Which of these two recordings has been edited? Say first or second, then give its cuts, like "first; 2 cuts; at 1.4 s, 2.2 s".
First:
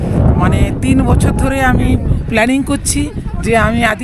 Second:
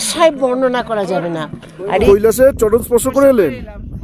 second; 1 cut; at 2.1 s